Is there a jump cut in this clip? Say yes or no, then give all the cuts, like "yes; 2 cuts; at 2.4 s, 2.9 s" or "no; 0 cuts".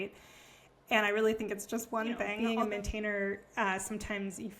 yes; 1 cut; at 2.3 s